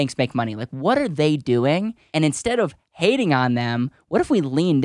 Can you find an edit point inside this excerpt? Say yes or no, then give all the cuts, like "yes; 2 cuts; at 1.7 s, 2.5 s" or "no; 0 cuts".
yes; 1 cut; at 2.0 s